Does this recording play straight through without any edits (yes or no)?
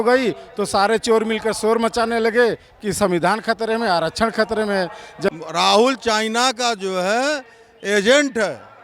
no